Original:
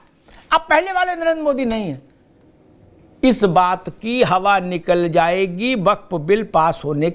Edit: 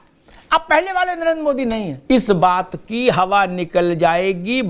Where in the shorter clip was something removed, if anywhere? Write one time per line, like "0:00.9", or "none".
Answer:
0:01.9